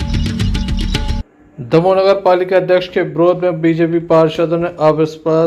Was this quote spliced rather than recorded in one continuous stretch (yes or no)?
yes